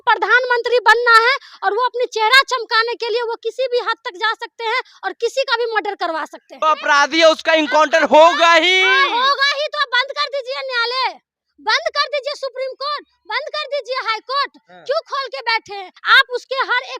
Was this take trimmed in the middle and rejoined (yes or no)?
yes